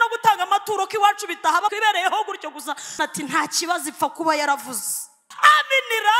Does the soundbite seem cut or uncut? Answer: cut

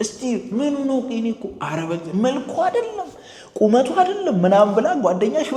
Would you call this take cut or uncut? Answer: uncut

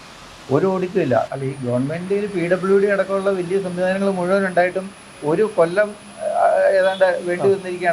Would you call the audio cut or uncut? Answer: cut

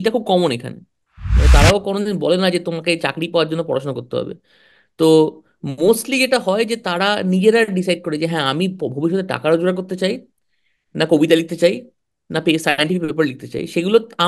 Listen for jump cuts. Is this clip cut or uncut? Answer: cut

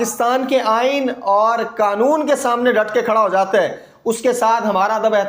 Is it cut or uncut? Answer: uncut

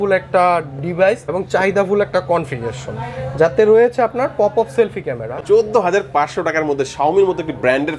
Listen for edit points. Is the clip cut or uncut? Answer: cut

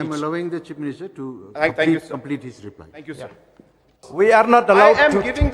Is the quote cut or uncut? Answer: cut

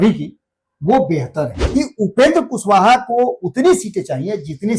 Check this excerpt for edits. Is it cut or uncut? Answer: cut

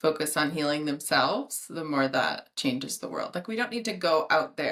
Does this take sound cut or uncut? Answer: uncut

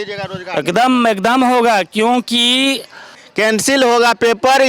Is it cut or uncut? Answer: cut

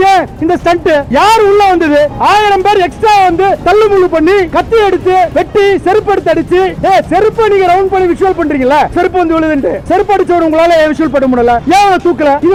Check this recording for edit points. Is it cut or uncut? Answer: uncut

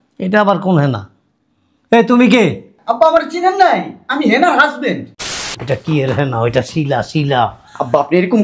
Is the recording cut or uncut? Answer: cut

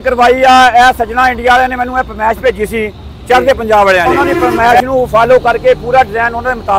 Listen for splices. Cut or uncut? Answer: cut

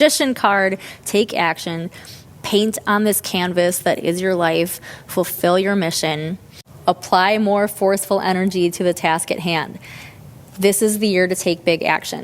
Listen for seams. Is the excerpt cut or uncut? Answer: cut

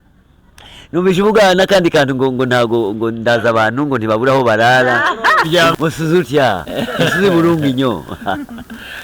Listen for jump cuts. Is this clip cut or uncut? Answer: cut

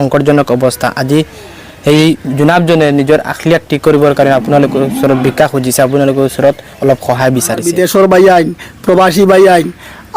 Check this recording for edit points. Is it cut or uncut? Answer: cut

